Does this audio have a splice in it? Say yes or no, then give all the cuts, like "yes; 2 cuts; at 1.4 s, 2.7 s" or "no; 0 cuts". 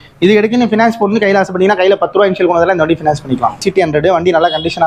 yes; 1 cut; at 3.6 s